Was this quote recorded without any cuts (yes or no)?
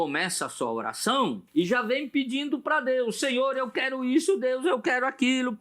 no